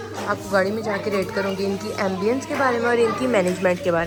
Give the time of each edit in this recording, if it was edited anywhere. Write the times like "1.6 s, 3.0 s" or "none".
none